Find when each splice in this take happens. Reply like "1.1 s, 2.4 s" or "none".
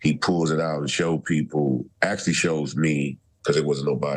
1.9 s, 3.2 s